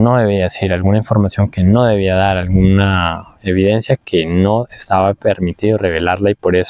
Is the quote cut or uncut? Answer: uncut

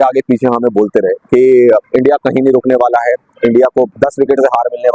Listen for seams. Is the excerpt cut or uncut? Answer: cut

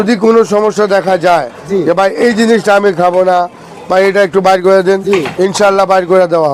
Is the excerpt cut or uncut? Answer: uncut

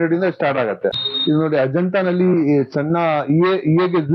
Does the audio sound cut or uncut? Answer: cut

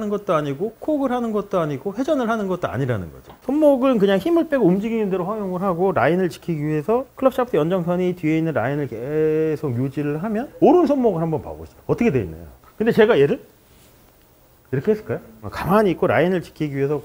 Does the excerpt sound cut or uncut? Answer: cut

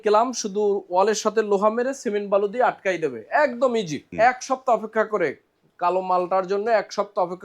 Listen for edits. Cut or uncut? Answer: cut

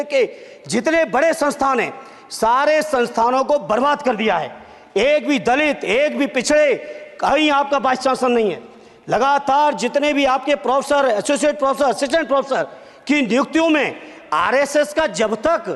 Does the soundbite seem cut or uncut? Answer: uncut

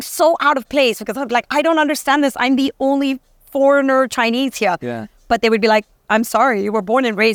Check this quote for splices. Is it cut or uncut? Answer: uncut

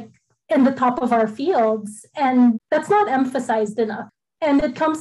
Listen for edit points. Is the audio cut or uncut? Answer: cut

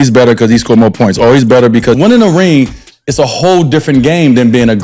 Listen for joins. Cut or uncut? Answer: cut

